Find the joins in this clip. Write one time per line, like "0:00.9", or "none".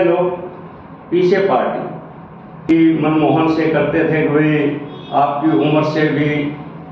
0:02.7